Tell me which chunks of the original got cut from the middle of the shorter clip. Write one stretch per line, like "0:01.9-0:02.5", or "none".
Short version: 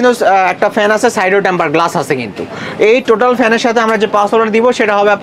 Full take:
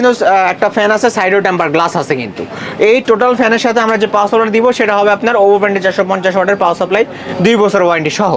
none